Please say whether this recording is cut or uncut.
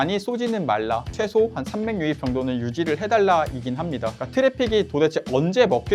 cut